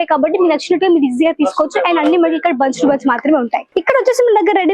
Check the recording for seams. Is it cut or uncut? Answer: cut